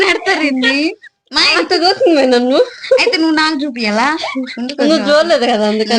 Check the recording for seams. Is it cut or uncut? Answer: uncut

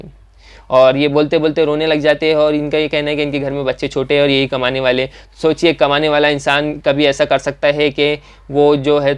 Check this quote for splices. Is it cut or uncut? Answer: uncut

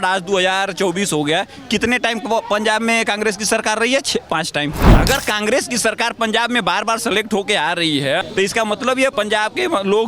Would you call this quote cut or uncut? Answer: cut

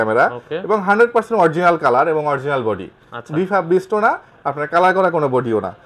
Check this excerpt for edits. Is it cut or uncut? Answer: uncut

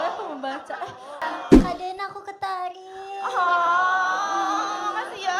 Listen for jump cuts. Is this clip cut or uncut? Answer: cut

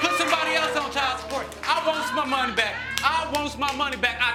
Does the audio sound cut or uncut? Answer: uncut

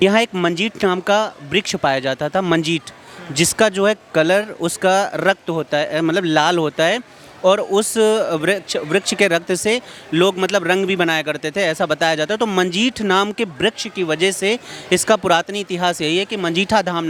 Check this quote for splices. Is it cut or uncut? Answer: uncut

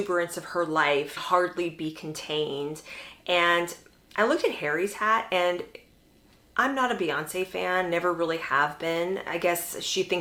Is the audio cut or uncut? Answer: uncut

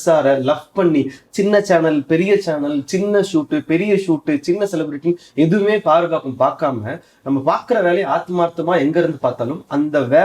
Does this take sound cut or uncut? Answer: uncut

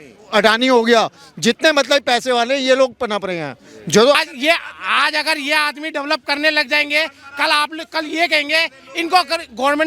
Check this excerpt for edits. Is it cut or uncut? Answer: cut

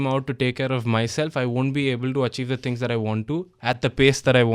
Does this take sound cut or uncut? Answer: uncut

